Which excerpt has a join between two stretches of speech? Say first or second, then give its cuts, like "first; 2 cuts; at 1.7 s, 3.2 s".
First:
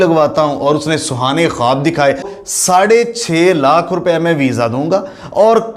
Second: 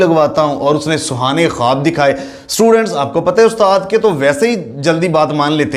first; 1 cut; at 2.4 s